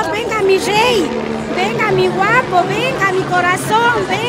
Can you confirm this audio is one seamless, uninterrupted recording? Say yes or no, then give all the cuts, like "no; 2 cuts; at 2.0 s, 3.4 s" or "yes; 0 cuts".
yes; 0 cuts